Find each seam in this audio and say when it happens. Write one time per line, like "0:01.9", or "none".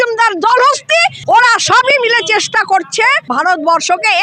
0:01.2
0:03.2